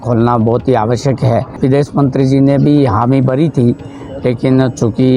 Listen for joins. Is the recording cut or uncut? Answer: cut